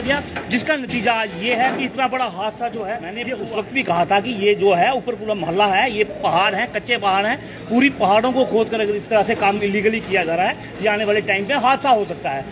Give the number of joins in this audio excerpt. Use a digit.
1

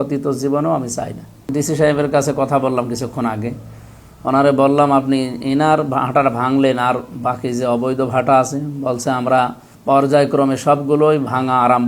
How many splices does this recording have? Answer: 2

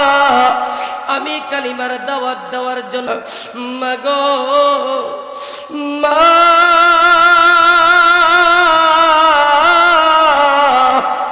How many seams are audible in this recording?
1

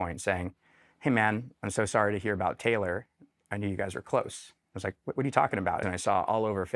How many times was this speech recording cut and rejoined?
2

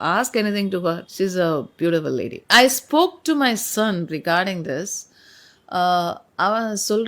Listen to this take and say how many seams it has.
2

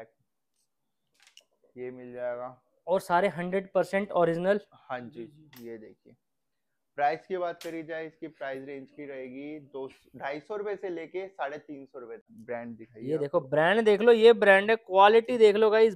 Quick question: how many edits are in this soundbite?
1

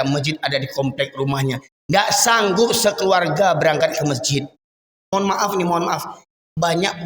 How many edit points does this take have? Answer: 1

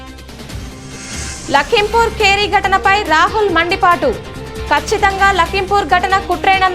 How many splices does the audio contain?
1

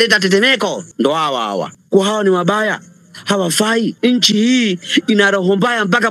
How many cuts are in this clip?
3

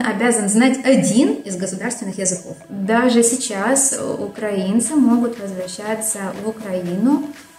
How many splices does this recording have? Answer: 1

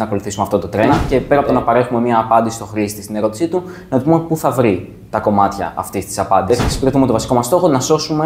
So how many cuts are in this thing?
2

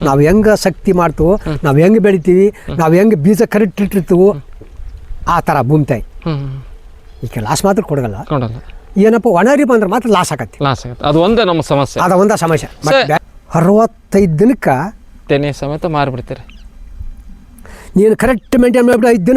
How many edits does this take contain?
1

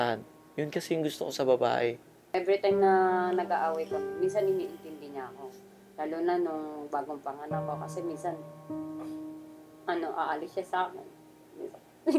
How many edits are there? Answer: 1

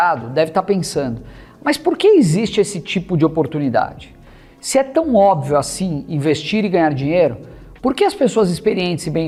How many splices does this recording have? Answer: 0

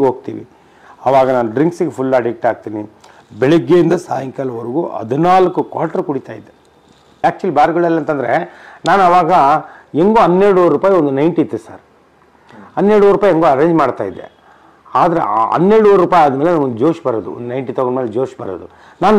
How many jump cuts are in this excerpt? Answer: 1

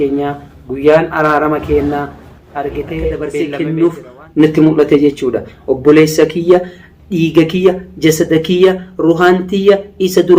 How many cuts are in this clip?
1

